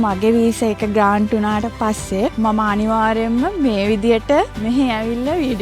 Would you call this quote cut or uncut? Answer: cut